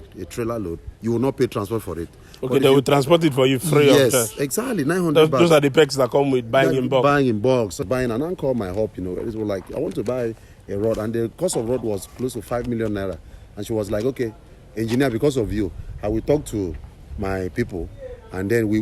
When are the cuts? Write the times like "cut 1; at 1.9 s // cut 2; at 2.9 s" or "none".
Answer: cut 1; at 7.8 s